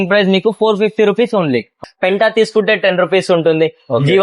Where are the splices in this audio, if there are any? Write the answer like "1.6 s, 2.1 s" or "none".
1.8 s